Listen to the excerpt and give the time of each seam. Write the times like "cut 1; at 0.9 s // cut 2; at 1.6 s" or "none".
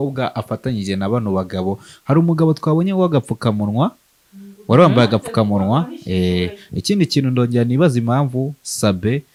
none